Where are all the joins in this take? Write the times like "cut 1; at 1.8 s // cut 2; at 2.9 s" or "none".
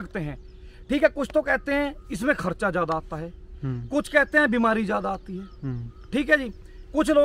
none